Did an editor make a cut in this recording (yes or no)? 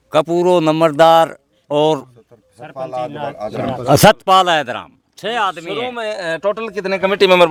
no